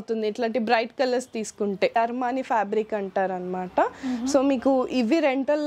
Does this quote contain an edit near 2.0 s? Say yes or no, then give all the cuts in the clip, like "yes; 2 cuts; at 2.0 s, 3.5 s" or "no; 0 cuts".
yes; 1 cut; at 2.0 s